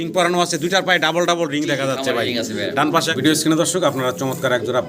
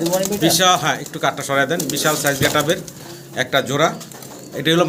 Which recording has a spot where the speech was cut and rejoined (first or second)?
first